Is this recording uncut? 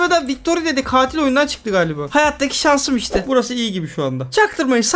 no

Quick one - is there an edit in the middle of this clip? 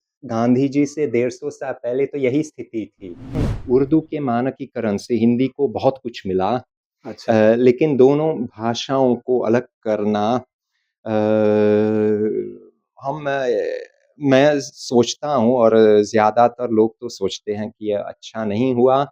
yes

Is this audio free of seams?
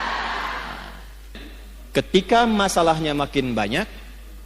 no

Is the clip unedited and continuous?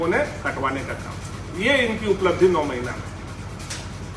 yes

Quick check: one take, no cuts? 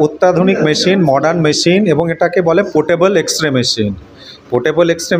yes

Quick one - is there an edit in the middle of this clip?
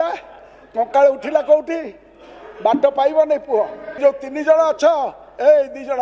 yes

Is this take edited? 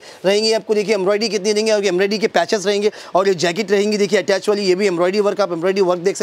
no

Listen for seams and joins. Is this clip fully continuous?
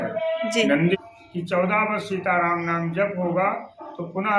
no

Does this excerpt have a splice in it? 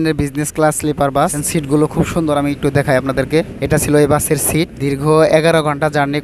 yes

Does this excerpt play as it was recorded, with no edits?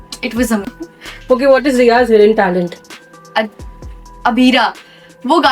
no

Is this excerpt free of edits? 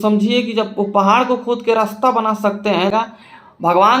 no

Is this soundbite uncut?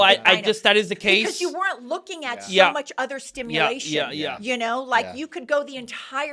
yes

